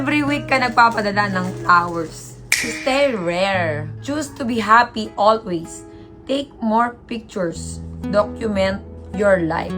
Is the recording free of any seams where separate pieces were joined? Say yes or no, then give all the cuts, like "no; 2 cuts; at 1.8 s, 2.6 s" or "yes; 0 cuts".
no; 1 cut; at 2.6 s